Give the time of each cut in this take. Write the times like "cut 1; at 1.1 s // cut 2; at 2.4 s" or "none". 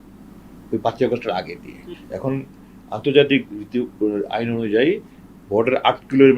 cut 1; at 1.9 s